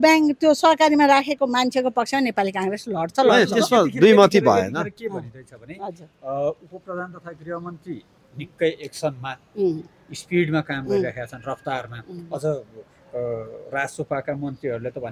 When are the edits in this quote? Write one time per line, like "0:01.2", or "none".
none